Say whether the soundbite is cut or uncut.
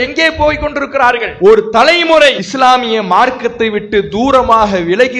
cut